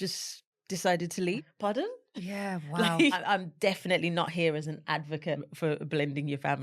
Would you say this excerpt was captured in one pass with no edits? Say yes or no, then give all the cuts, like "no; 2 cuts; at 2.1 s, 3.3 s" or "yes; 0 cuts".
no; 3 cuts; at 1.4 s, 3.2 s, 5.5 s